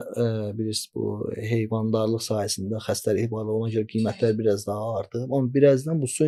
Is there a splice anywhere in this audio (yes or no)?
no